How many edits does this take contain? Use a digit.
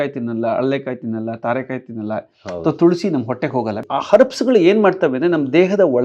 1